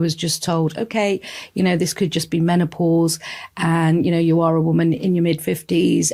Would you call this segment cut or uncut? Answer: uncut